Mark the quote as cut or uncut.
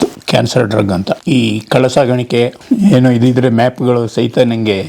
cut